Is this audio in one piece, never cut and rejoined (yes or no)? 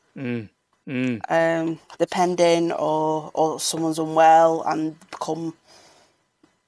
yes